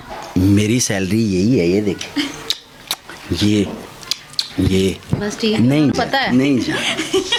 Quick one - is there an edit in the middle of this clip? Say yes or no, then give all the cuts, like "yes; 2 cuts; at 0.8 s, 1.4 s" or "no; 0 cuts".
no; 0 cuts